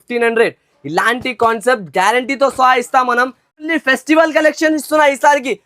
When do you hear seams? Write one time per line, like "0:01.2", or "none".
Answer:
0:03.7